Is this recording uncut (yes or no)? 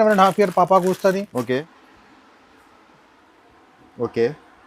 no